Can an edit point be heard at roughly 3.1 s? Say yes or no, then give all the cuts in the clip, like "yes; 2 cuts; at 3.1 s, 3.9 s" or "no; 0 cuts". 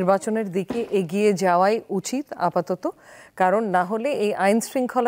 no; 0 cuts